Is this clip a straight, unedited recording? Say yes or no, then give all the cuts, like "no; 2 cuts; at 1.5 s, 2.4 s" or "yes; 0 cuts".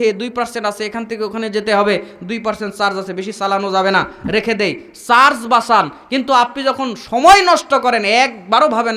yes; 0 cuts